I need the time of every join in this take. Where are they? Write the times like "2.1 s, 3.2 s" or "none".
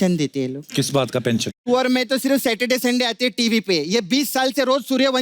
1.4 s